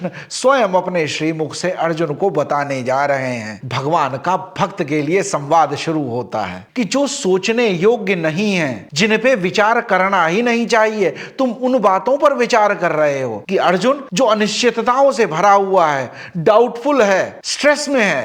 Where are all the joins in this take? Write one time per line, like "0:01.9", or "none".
0:03.5
0:06.6
0:13.4